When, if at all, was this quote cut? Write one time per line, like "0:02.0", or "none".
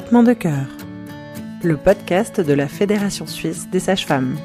none